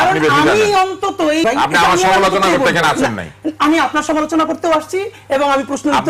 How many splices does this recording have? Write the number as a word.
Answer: one